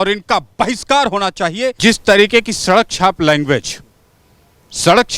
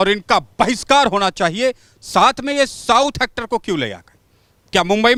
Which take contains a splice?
first; 1 cut; at 1.8 s

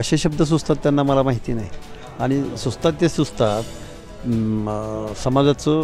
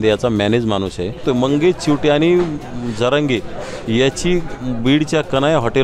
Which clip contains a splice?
second; 1 cut; at 1.2 s

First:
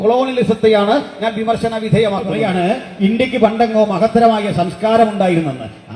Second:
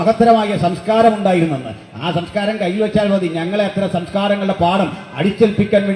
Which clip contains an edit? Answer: first; 1 cut; at 2.3 s

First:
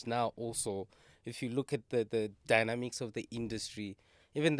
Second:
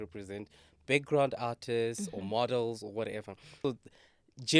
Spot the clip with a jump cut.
second; 1 cut; at 3.6 s

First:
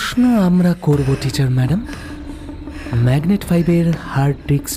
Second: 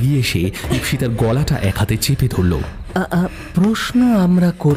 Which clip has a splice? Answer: second; 1 cut; at 2.8 s

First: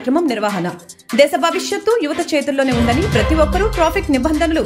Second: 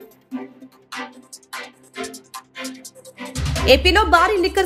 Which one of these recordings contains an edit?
second; 1 cut; at 1.1 s

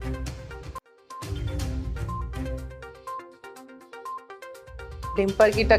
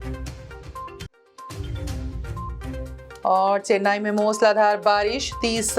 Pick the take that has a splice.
second; 2 cuts; at 1.0 s, 2.7 s

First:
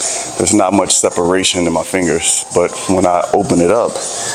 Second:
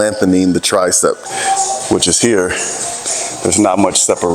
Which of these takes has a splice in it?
second; 1 cut; at 1.3 s

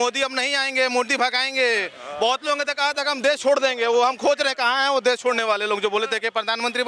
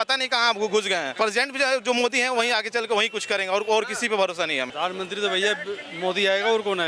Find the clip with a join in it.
second; 2 cuts; at 1.1 s, 4.7 s

